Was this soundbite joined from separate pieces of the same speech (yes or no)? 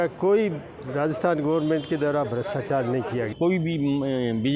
yes